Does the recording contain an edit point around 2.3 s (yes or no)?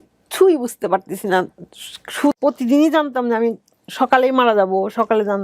yes